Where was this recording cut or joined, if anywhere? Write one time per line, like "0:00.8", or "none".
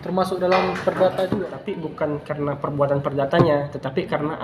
0:01.5